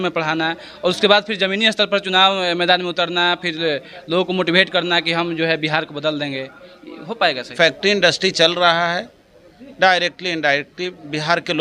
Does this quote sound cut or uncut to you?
cut